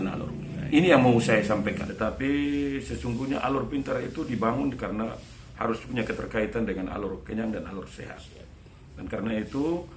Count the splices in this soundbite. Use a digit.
1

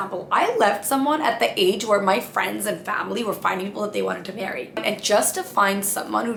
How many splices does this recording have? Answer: 0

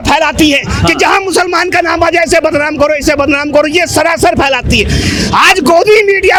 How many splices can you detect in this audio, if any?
0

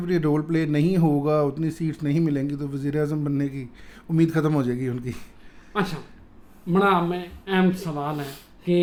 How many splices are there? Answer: 0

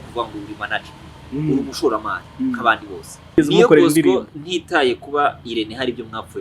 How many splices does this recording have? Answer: 1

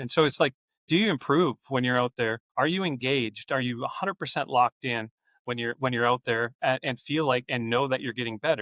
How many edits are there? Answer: 1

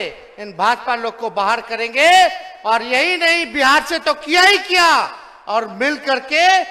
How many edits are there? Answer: 0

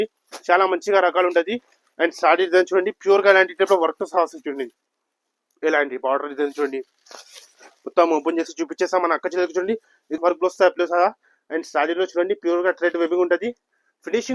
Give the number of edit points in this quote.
1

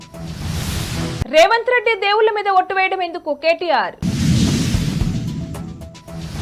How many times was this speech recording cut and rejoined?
0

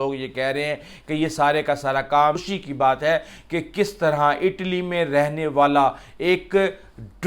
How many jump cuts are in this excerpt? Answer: 1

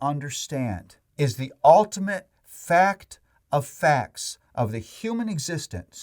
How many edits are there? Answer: 1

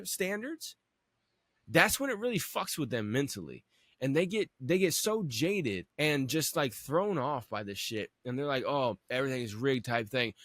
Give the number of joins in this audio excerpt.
2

